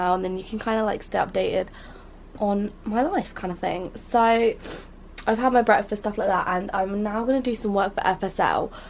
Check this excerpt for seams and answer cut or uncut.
cut